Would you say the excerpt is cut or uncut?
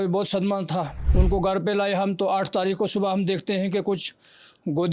cut